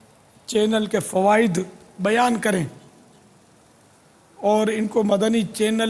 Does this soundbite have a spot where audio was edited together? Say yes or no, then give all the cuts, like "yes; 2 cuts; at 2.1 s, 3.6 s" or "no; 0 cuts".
no; 0 cuts